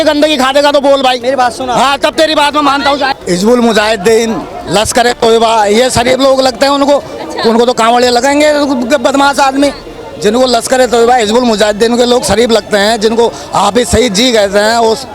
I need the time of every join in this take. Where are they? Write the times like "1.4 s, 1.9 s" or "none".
3.2 s